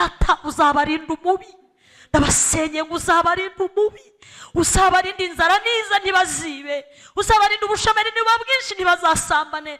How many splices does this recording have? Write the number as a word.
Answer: zero